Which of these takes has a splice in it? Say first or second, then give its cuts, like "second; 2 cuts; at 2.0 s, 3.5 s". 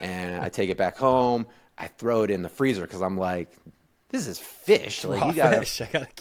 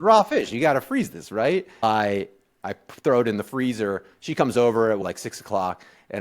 second; 2 cuts; at 1.8 s, 5.0 s